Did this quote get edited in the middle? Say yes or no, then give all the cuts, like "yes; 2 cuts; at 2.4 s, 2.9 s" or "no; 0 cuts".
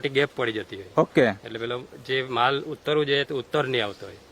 no; 0 cuts